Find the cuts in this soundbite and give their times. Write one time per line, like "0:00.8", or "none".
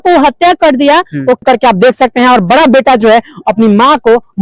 0:01.4

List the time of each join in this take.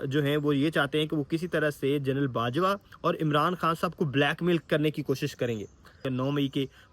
0:06.0

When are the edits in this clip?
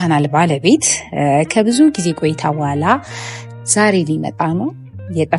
none

